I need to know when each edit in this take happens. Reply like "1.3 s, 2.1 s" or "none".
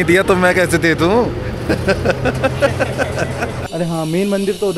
3.6 s